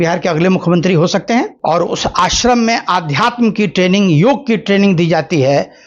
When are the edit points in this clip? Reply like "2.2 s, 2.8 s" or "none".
1.5 s